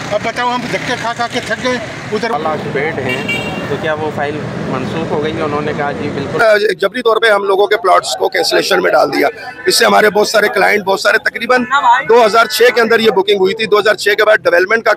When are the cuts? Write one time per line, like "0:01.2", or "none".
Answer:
0:02.3
0:06.4